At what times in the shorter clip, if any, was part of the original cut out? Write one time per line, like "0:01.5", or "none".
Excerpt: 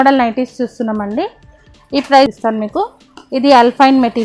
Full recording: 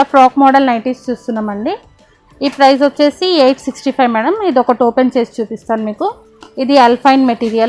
0:02.3